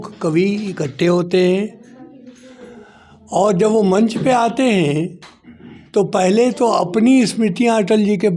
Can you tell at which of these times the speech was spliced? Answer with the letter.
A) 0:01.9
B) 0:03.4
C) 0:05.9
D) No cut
D